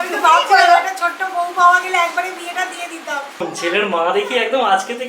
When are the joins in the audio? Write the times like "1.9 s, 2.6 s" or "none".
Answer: 3.4 s